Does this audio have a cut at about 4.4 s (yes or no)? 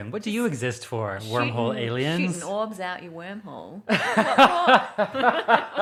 no